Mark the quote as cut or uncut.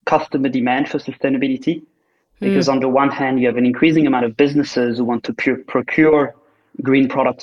uncut